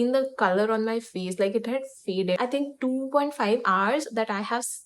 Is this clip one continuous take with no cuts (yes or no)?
no